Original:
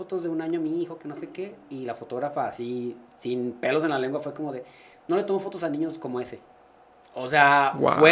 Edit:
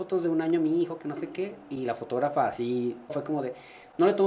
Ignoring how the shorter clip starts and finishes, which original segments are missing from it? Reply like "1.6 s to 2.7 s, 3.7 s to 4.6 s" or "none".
3.2 s to 4.3 s